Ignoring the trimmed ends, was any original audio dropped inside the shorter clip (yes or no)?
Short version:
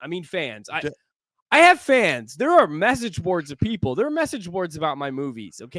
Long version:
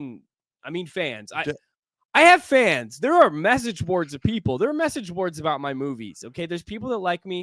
no